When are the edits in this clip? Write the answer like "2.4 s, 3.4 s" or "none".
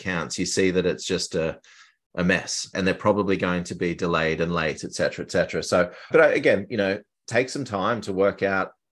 none